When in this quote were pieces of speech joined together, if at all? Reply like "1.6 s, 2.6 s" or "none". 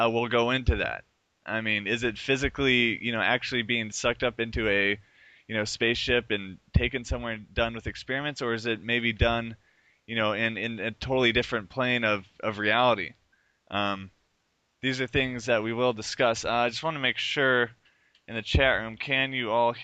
8.4 s